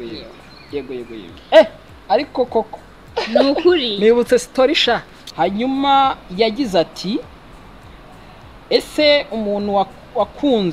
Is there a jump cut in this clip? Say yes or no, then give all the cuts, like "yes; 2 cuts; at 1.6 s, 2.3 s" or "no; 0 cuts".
yes; 1 cut; at 5.2 s